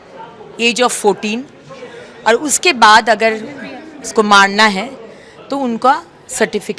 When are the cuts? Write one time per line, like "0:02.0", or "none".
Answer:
none

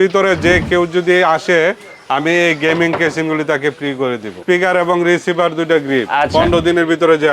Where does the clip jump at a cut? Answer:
0:04.4

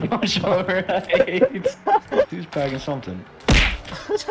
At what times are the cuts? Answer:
0:02.3

